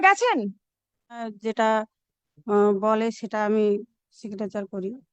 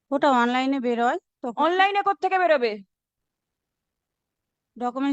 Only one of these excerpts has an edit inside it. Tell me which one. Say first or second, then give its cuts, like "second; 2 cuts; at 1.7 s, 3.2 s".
first; 1 cut; at 1.3 s